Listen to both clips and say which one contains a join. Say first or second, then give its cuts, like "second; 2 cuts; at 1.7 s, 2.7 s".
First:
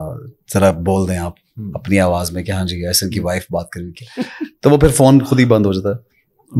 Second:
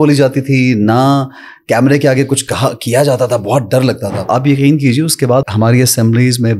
second; 2 cuts; at 4.3 s, 5.5 s